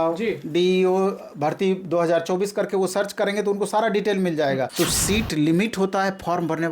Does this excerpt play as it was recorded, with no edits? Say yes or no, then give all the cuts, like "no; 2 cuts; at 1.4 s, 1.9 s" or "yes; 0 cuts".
no; 1 cut; at 4.7 s